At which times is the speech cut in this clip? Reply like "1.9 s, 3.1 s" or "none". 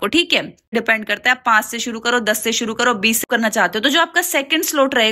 0.7 s, 3.2 s

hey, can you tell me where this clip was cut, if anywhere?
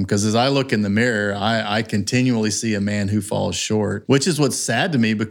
4.0 s

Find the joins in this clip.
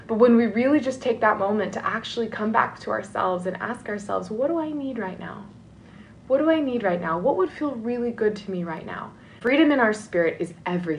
9.4 s

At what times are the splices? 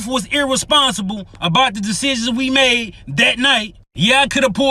none

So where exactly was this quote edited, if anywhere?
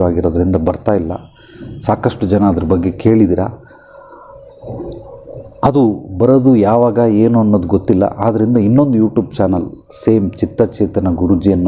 none

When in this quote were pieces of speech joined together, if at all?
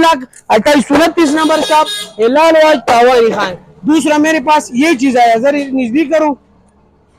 none

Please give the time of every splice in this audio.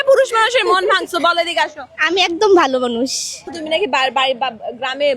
3.5 s

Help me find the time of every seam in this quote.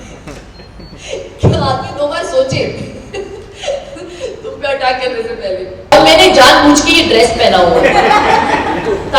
5.9 s

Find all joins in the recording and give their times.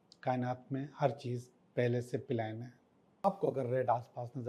3.3 s

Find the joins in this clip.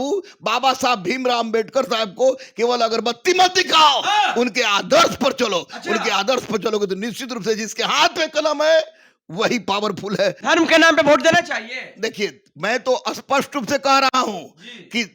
10.4 s

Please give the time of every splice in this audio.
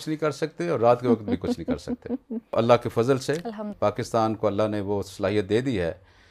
2.5 s

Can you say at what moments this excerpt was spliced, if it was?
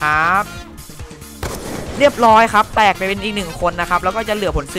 none

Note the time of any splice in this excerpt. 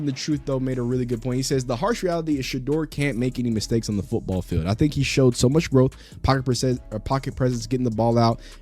none

